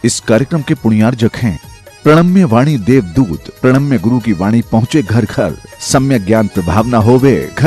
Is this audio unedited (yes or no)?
yes